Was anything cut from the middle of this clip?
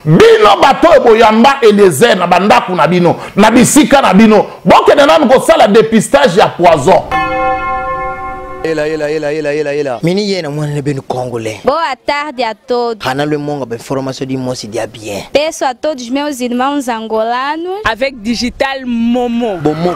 yes; 1 cut; at 7.1 s

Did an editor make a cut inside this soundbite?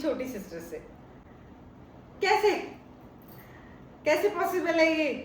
no; 0 cuts

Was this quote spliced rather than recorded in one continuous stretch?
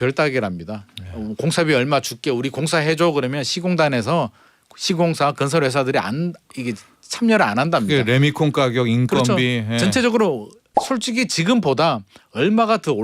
no; 0 cuts

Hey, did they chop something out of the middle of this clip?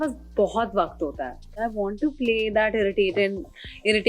yes; 1 cut; at 1.6 s

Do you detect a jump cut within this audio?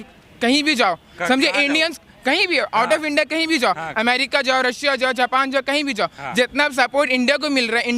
no; 0 cuts

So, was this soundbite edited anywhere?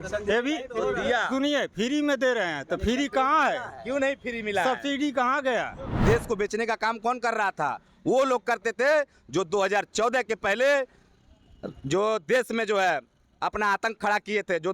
yes; 1 cut; at 6.0 s

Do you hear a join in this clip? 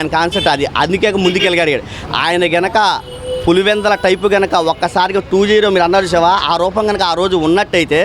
no; 0 cuts

